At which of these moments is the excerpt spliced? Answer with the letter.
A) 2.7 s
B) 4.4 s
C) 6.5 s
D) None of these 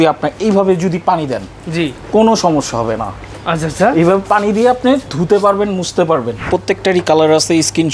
C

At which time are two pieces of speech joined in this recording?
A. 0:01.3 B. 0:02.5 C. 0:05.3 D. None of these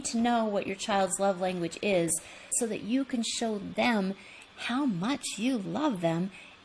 B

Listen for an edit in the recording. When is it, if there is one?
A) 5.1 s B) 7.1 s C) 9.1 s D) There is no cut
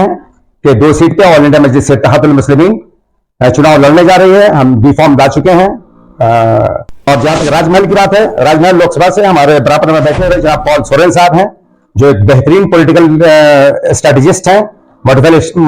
B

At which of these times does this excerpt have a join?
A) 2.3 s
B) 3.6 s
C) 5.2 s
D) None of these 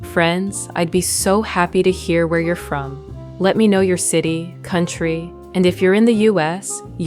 D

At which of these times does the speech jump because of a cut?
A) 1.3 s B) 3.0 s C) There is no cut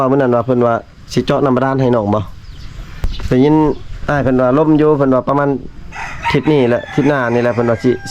B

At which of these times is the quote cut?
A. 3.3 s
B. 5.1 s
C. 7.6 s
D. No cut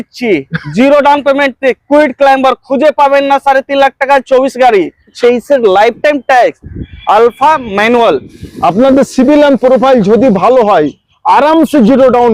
B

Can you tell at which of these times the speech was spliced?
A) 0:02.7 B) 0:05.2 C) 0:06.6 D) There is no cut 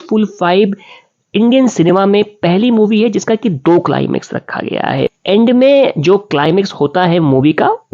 B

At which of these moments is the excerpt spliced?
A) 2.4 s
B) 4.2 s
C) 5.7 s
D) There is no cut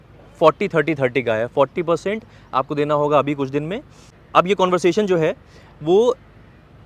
B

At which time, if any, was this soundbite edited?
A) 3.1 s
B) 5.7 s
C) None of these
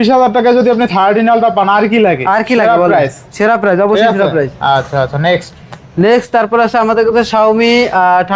C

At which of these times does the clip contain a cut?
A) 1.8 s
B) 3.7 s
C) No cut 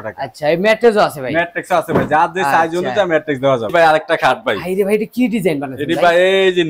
B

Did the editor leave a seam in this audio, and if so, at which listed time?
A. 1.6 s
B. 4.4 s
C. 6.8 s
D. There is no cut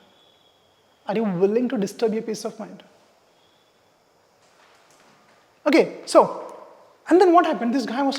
B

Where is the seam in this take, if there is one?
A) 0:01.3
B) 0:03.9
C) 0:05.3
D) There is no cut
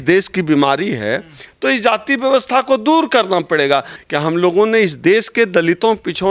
B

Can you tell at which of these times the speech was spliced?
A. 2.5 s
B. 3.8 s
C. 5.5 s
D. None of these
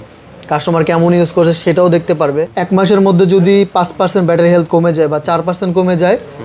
A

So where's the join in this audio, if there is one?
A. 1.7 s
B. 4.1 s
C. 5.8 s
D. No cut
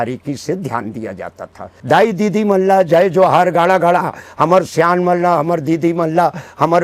A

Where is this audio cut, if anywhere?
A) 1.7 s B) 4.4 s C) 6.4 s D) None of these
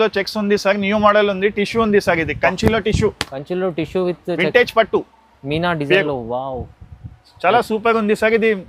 D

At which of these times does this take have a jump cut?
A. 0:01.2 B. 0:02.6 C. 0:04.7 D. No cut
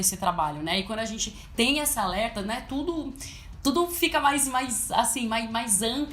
D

